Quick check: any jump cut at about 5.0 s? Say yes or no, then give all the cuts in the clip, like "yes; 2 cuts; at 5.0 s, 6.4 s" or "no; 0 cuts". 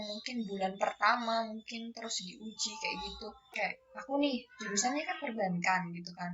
no; 1 cut; at 3.5 s